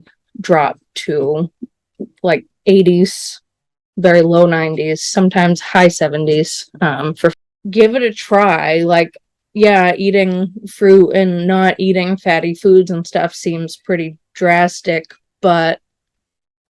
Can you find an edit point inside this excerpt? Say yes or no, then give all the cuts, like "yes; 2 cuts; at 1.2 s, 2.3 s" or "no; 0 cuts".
yes; 1 cut; at 7.3 s